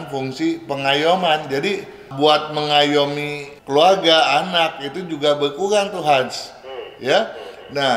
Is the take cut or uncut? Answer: uncut